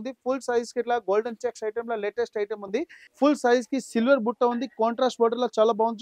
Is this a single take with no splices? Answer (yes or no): no